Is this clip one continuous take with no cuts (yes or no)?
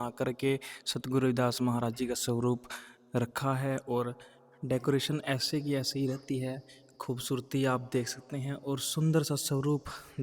yes